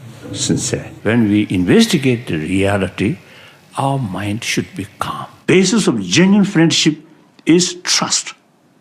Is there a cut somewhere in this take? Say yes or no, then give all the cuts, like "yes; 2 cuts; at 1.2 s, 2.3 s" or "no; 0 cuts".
yes; 2 cuts; at 1.0 s, 5.4 s